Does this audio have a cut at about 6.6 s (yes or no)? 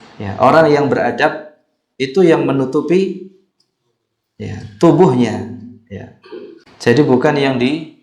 yes